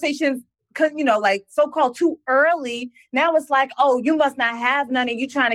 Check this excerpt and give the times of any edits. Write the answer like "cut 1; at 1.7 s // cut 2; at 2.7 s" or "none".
none